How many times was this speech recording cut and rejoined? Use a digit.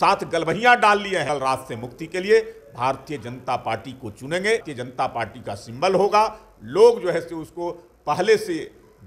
2